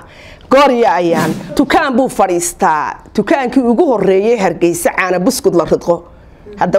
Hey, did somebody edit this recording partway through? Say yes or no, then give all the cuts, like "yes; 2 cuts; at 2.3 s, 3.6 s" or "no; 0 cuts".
yes; 1 cut; at 1.5 s